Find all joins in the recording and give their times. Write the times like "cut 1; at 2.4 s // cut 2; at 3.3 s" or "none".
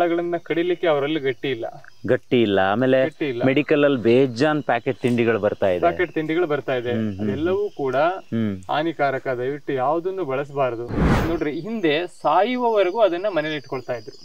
cut 1; at 11.0 s